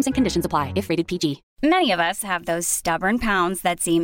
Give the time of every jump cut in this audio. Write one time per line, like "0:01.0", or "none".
0:01.5